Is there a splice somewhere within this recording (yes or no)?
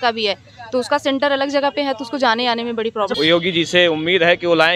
yes